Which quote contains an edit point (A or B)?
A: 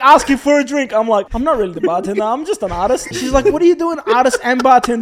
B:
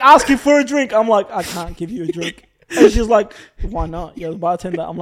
A